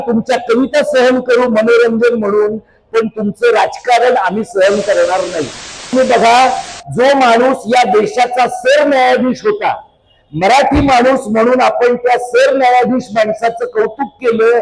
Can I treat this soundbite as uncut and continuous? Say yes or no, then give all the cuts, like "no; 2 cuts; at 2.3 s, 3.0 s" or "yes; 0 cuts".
no; 1 cut; at 5.8 s